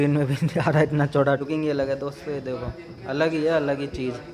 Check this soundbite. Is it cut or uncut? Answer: cut